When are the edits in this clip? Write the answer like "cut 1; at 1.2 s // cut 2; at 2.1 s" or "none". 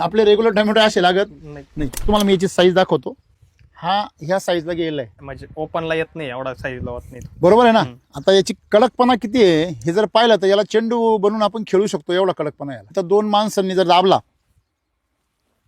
cut 1; at 2.1 s // cut 2; at 5.3 s // cut 3; at 12.9 s